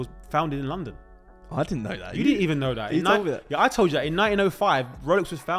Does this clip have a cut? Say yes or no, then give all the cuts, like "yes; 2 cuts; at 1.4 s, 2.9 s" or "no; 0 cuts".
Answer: no; 0 cuts